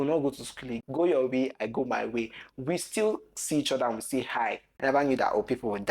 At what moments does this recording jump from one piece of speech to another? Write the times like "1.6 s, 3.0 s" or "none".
0.8 s, 4.7 s